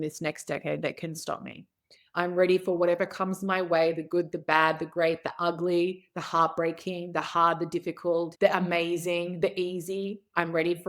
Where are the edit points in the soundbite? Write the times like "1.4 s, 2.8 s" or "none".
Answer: 8.3 s